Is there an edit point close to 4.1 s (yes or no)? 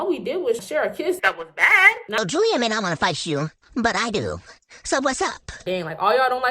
no